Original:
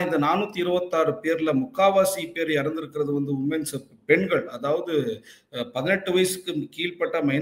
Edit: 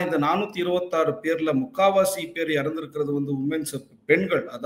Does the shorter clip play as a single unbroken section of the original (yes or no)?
yes